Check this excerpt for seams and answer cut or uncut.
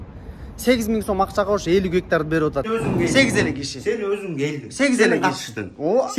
cut